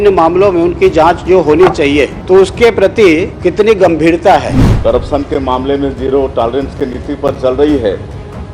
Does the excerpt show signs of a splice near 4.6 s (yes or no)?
yes